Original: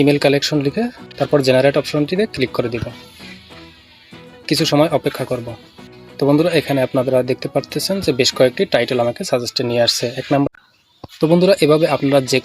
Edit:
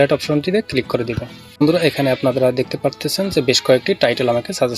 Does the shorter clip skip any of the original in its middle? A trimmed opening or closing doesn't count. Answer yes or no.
yes